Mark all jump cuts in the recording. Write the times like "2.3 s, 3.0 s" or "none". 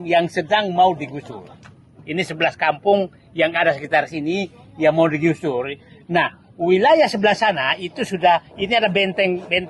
none